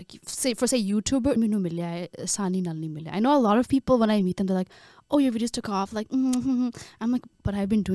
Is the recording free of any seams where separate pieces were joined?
no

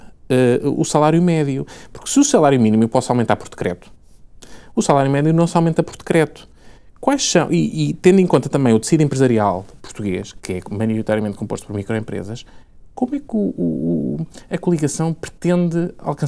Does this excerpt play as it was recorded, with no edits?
yes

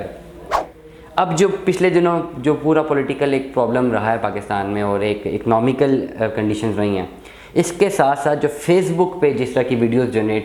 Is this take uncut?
yes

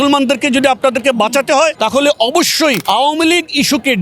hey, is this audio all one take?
no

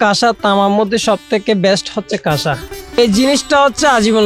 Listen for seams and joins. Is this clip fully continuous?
no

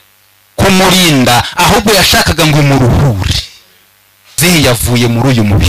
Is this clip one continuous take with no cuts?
no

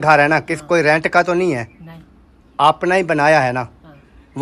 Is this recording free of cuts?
yes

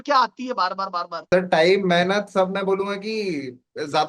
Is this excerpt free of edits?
no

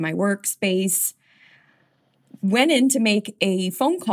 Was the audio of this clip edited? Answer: no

